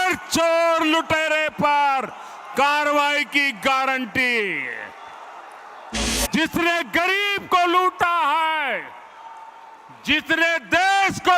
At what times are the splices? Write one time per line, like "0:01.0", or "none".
0:06.1

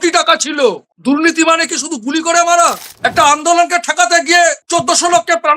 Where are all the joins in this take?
0:02.9
0:04.6

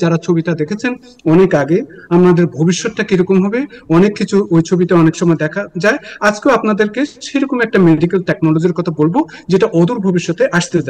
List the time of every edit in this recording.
none

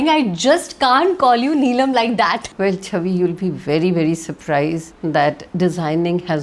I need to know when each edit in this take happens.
0:02.5
0:04.9

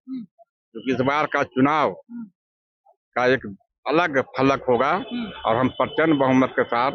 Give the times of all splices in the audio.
none

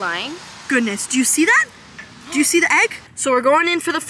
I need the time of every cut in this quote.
0:03.1

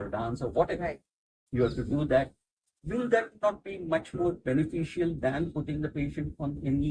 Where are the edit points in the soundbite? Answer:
none

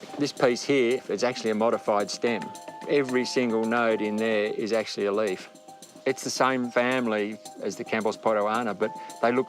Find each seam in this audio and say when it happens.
0:01.0

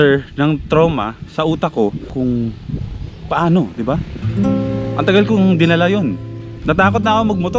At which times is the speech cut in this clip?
0:02.1

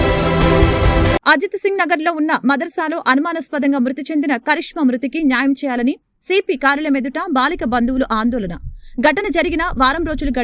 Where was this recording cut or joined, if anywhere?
0:01.2

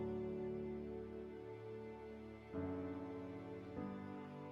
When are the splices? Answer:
none

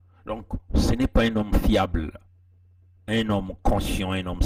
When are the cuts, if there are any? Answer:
none

